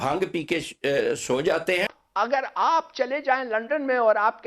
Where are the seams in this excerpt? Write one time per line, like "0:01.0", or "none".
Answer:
0:02.0